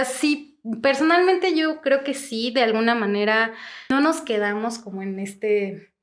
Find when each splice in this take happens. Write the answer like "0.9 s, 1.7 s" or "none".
3.9 s